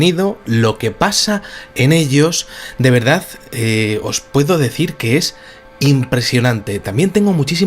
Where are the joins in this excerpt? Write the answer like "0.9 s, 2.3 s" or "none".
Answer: 2.9 s